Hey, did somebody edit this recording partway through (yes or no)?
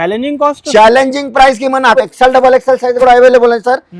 yes